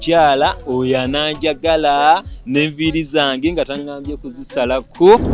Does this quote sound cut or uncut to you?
uncut